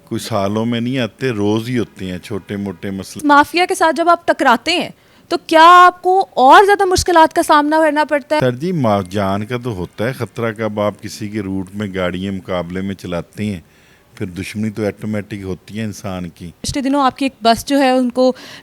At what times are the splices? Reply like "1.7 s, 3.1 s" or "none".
3.2 s, 8.4 s, 16.7 s